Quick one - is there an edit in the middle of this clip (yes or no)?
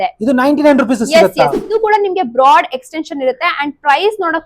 yes